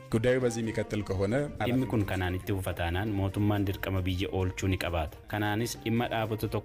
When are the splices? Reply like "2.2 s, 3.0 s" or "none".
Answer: 1.6 s, 5.2 s

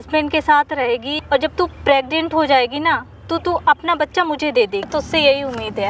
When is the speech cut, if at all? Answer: 1.1 s, 4.9 s

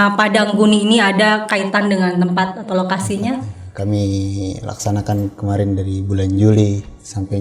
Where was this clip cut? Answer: 3.6 s

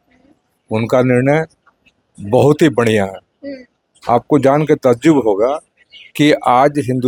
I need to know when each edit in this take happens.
none

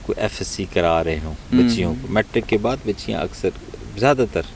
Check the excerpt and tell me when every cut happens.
none

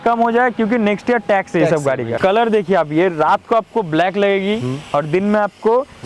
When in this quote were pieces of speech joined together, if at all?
2.1 s

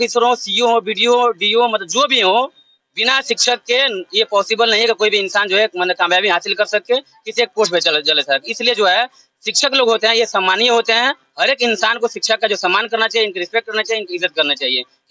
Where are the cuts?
none

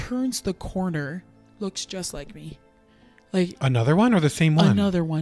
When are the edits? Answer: none

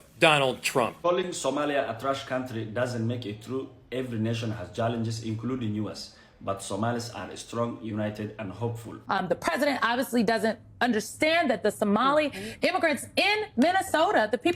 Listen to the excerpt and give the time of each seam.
0.9 s, 8.9 s

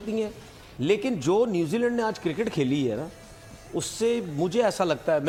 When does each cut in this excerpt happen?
none

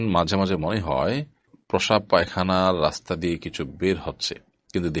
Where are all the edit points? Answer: 1.5 s

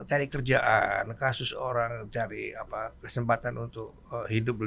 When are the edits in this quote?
none

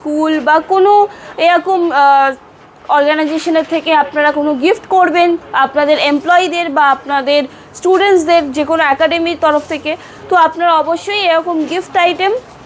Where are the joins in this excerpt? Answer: none

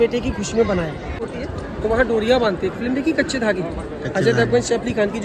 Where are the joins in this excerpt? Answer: 1.2 s

